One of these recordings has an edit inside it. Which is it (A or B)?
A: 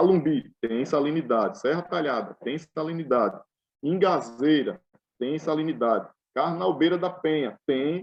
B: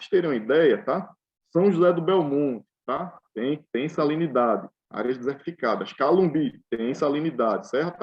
B